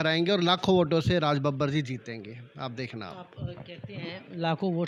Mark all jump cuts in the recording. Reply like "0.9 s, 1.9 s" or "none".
none